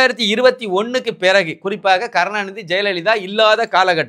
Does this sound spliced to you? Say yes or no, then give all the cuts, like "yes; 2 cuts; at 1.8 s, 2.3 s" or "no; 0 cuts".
no; 0 cuts